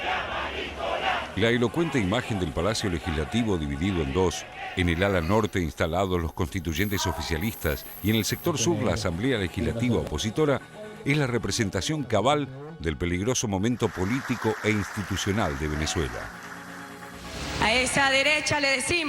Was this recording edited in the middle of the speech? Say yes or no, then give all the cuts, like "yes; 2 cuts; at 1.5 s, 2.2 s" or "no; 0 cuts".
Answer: yes; 1 cut; at 8.2 s